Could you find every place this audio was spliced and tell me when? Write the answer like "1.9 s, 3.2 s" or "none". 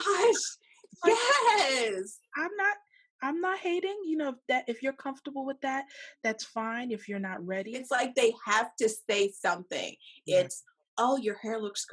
7.8 s